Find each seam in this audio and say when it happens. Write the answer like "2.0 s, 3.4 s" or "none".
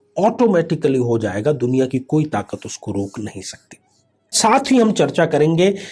4.3 s